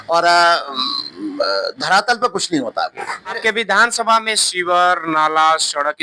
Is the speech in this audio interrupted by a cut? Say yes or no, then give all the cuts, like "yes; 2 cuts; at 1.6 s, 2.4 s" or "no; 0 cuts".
yes; 1 cut; at 3.4 s